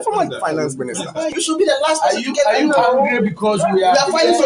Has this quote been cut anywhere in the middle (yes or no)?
yes